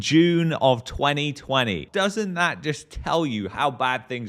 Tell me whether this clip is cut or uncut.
cut